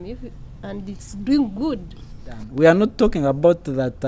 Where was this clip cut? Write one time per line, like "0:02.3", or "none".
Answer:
0:02.4